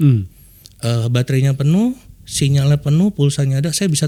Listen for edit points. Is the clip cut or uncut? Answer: uncut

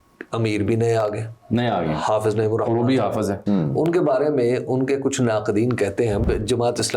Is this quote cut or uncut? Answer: cut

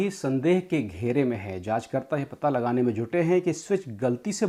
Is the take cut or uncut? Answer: uncut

